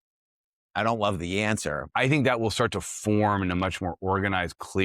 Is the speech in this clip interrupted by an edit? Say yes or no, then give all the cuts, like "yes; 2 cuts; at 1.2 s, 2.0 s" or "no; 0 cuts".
yes; 1 cut; at 1.8 s